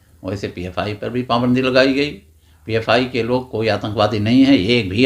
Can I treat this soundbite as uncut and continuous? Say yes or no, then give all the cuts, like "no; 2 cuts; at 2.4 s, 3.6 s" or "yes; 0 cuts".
yes; 0 cuts